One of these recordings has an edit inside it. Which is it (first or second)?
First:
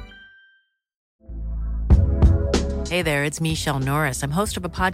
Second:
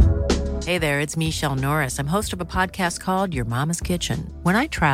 first